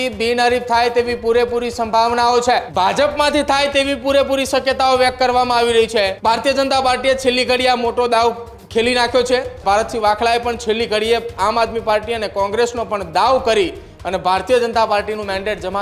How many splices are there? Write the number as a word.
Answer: three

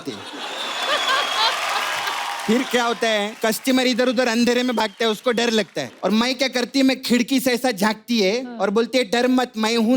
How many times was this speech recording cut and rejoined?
two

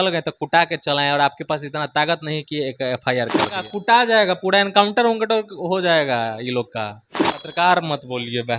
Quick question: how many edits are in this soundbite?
two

